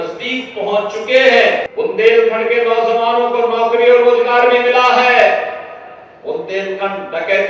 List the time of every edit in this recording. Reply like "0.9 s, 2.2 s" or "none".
1.7 s